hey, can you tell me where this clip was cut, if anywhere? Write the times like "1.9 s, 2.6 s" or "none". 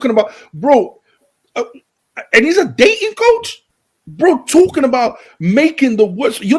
none

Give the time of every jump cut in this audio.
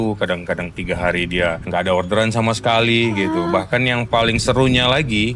1.6 s

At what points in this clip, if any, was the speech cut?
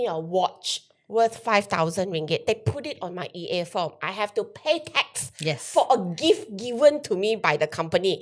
none

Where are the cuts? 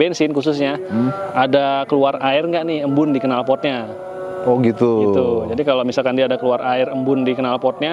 none

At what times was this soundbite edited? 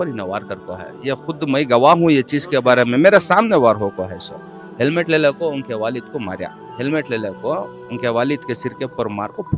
6.6 s

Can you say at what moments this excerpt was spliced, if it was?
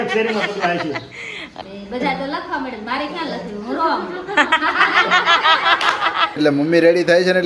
1.5 s, 6.4 s

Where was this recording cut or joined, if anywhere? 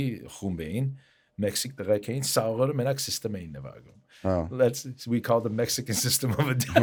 none

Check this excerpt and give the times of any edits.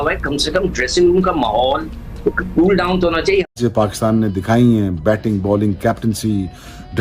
3.6 s

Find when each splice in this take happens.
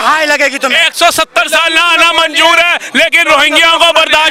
none

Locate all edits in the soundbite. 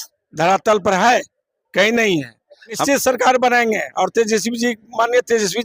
2.8 s

